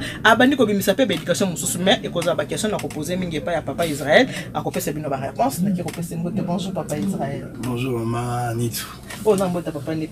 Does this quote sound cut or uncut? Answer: uncut